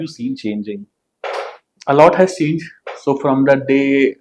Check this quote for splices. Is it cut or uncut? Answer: uncut